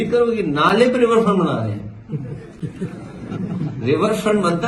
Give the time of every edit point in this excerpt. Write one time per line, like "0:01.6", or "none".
none